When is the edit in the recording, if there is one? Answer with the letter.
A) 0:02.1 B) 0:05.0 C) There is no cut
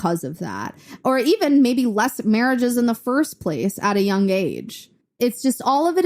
B